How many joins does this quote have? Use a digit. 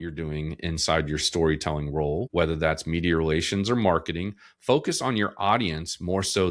1